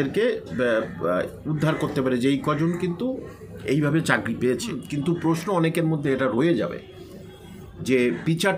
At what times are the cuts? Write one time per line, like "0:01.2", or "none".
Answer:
0:04.8